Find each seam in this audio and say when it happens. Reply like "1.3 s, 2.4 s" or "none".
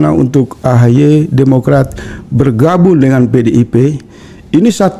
none